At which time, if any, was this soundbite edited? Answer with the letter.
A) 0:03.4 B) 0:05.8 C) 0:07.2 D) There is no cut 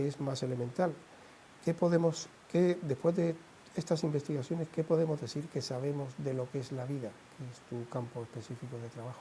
A